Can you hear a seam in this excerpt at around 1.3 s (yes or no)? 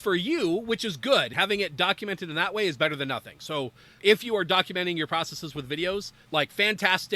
yes